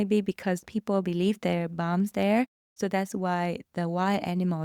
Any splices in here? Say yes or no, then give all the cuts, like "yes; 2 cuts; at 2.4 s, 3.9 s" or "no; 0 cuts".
no; 0 cuts